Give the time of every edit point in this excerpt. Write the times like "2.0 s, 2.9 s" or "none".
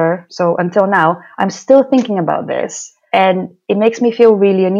none